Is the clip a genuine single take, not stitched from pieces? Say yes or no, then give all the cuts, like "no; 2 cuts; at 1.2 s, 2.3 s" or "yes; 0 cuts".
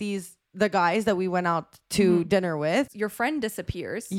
yes; 0 cuts